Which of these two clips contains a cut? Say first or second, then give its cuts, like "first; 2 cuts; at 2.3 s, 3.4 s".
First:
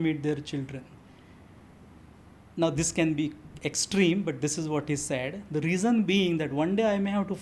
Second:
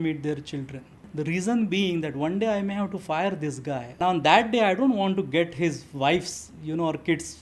second; 2 cuts; at 1.0 s, 3.9 s